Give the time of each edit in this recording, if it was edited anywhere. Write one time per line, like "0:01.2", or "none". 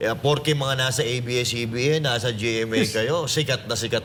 none